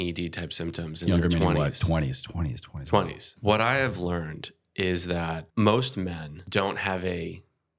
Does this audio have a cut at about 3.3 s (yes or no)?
yes